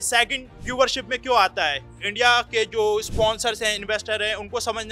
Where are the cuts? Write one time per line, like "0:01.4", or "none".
0:01.8

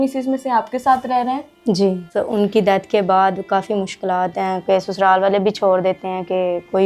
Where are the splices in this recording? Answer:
0:02.0

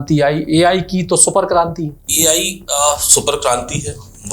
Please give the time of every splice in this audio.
0:02.0

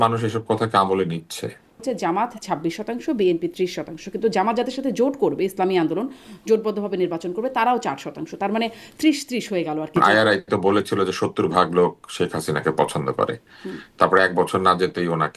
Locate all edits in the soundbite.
0:01.8
0:10.0

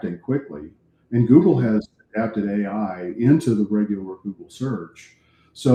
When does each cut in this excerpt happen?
none

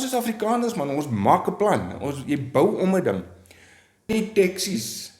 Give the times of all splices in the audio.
0:04.1

